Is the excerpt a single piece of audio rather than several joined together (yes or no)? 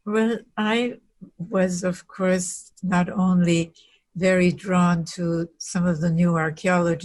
no